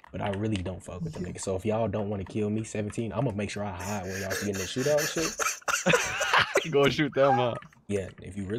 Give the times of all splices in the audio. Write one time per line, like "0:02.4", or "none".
none